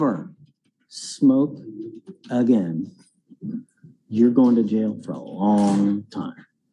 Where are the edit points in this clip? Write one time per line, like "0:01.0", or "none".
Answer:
none

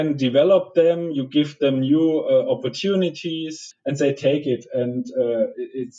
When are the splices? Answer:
0:03.6

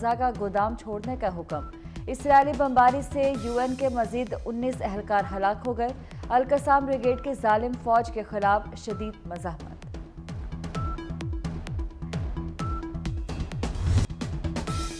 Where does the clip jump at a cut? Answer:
0:14.0

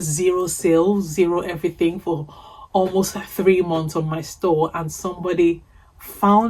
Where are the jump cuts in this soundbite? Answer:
none

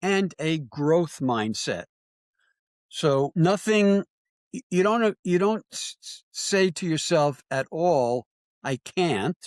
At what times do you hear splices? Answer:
0:03.3

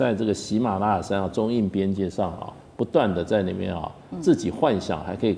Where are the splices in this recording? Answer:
none

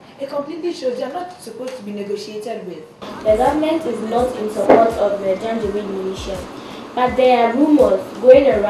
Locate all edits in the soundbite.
0:03.1

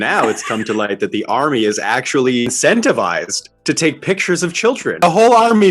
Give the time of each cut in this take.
0:02.4
0:05.0

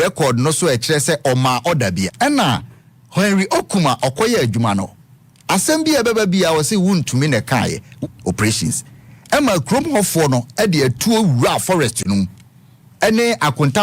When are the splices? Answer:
0:02.1
0:08.0

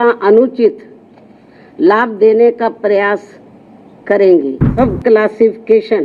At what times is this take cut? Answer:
0:04.6

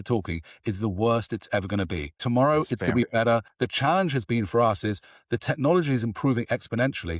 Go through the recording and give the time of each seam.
0:02.2
0:03.5

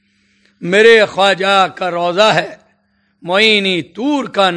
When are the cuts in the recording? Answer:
none

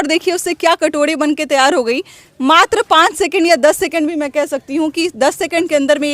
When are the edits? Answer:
none

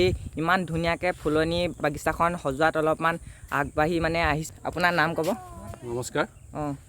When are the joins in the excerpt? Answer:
0:04.4

